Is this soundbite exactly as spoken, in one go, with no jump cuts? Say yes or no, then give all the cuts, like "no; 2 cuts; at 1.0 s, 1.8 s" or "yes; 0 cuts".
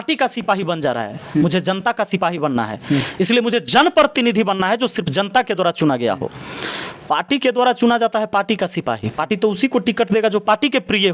yes; 0 cuts